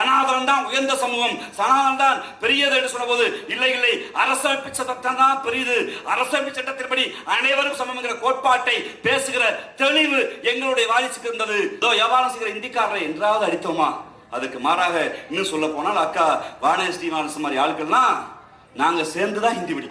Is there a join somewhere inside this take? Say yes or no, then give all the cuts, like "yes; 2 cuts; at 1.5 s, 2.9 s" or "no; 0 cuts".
yes; 1 cut; at 11.8 s